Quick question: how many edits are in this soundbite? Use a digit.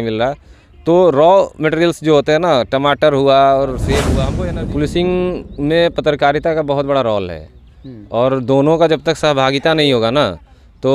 1